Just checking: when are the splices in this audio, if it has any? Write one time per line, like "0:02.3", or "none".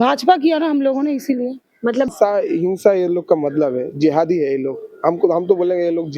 0:02.1